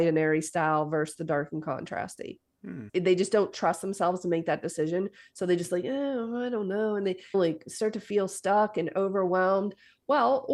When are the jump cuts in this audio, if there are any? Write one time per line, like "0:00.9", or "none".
none